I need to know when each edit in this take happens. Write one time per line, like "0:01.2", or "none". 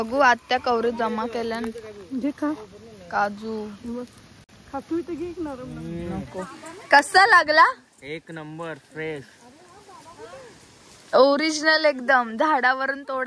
none